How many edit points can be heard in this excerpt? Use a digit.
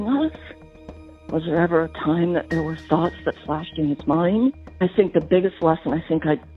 1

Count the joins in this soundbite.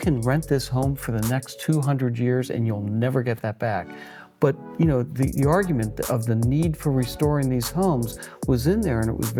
0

